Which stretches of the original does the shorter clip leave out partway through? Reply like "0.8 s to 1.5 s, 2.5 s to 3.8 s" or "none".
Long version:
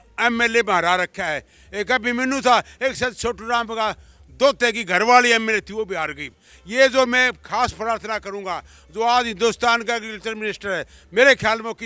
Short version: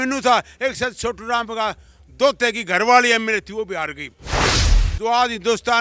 6.7 s to 8.5 s